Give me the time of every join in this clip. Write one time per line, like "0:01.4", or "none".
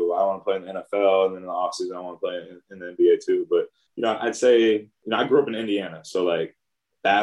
0:03.8
0:05.0